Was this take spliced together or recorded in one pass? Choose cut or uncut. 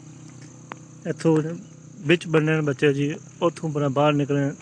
uncut